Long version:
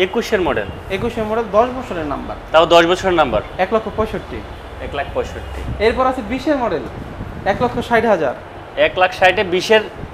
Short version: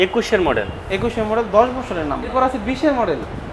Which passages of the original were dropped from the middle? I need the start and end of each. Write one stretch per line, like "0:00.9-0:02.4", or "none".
0:02.3-0:05.9